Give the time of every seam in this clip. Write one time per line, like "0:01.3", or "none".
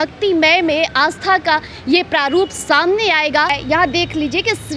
0:03.6